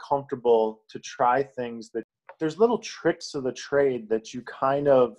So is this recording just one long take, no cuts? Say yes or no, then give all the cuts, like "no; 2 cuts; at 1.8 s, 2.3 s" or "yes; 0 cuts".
no; 1 cut; at 2.0 s